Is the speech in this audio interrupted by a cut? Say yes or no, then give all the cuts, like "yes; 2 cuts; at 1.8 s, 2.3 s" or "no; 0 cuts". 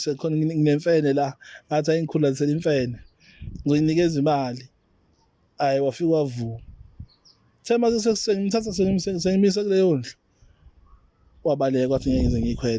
no; 0 cuts